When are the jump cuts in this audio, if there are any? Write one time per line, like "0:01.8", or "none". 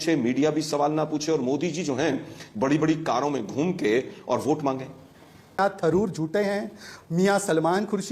0:05.6